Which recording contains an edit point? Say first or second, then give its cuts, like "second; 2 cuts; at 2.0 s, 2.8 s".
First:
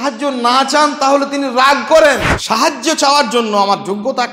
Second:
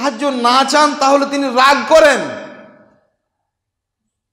first; 1 cut; at 2.3 s